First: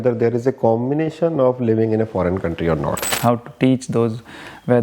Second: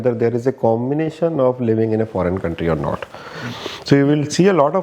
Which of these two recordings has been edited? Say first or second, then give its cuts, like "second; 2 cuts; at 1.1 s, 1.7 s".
first; 1 cut; at 3.2 s